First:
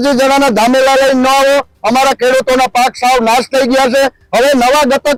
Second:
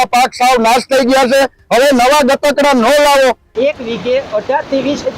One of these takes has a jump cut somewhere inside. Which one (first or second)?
second